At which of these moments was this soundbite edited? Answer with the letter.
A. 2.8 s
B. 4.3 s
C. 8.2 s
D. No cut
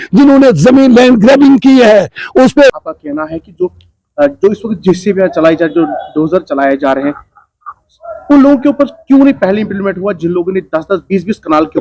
A